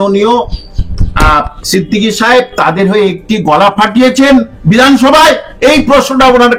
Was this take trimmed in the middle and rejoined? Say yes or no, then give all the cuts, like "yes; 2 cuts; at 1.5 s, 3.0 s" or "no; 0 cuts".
no; 0 cuts